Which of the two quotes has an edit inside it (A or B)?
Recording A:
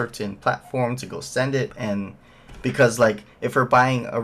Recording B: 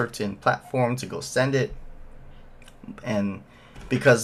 A